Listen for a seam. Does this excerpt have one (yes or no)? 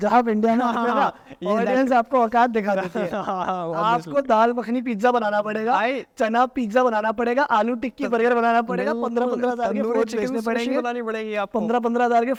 no